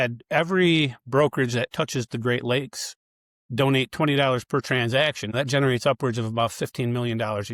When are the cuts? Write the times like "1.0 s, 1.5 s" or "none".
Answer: none